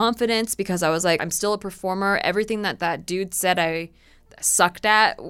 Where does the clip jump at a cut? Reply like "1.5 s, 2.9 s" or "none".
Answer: 1.2 s